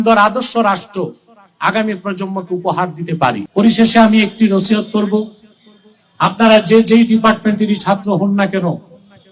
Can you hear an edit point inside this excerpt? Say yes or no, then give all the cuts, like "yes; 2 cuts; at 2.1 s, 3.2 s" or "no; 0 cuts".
yes; 1 cut; at 3.4 s